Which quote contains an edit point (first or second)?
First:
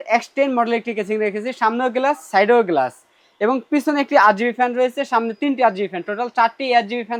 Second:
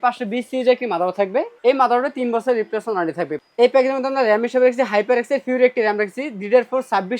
second